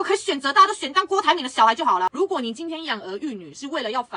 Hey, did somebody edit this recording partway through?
yes; 1 cut; at 2.1 s

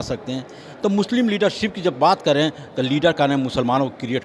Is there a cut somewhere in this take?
no; 0 cuts

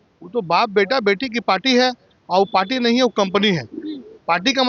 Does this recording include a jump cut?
no; 0 cuts

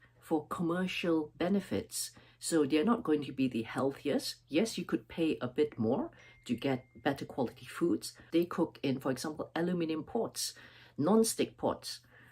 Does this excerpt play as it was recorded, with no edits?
no; 1 cut; at 8.1 s

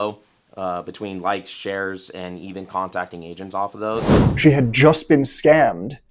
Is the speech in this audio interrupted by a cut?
yes; 1 cut; at 4.2 s

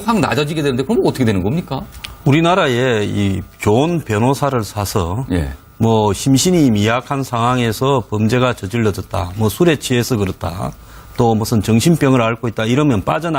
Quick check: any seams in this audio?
no; 0 cuts

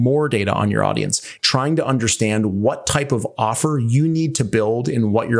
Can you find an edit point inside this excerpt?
yes; 1 cut; at 1.3 s

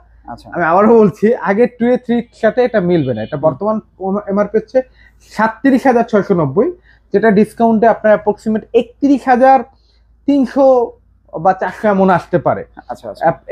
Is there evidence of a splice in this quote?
no; 0 cuts

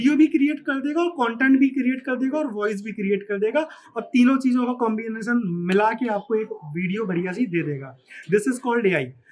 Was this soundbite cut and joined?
no; 0 cuts

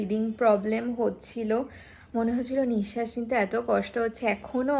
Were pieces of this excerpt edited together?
no; 0 cuts

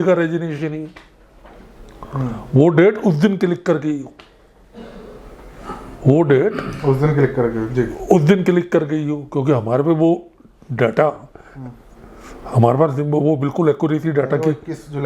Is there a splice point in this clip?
no; 0 cuts

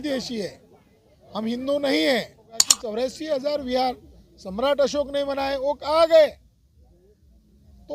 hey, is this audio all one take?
no; 1 cut; at 2.7 s

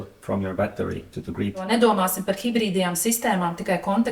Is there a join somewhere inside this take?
yes; 1 cut; at 1.6 s

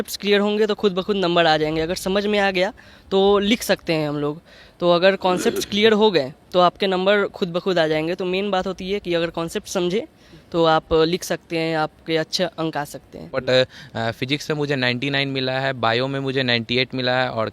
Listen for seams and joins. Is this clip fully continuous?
no; 1 cut; at 13.4 s

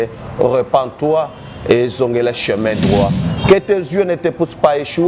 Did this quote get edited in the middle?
yes; 1 cut; at 3.2 s

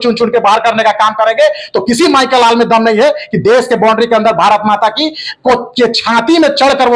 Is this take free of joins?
yes; 0 cuts

